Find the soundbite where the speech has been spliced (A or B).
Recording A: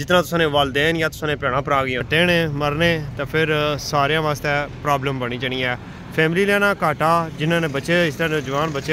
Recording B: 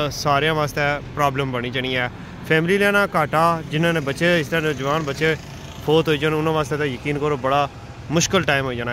A